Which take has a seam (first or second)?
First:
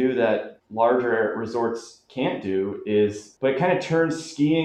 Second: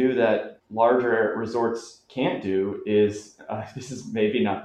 first